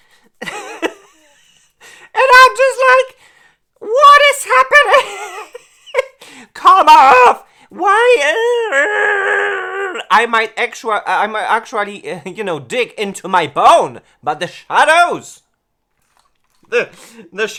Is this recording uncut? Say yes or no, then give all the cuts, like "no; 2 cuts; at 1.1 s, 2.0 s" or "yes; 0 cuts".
yes; 0 cuts